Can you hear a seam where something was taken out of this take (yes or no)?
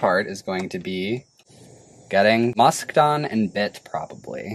no